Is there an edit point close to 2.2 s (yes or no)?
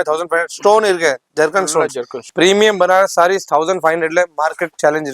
yes